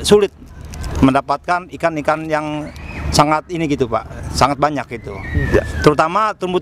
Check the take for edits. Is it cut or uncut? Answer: uncut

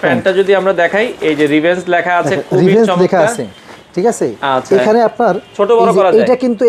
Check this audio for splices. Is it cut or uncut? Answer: uncut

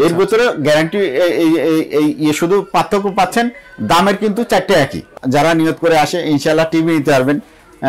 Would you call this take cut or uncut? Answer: cut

